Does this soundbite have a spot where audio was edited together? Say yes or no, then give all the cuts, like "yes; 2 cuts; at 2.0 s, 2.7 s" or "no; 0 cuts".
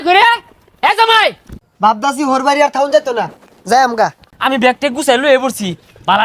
yes; 2 cuts; at 1.5 s, 4.2 s